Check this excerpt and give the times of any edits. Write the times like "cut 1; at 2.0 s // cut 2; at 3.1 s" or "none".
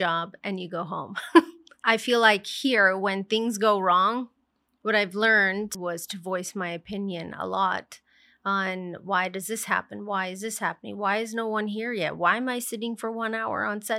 cut 1; at 1.7 s // cut 2; at 5.8 s